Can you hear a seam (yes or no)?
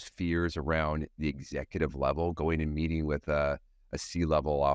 no